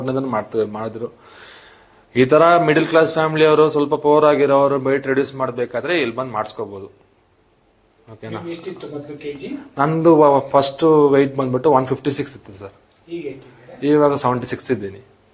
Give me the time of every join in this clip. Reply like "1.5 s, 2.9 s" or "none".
12.5 s